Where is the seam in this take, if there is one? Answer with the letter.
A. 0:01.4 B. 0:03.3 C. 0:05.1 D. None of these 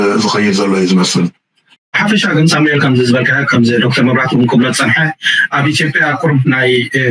A